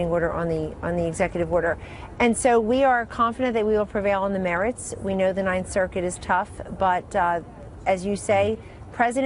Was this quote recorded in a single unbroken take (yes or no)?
no